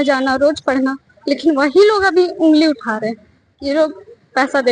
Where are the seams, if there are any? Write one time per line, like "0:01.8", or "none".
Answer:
none